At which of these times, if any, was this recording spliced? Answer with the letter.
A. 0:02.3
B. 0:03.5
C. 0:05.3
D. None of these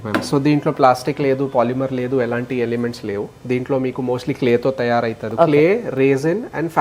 C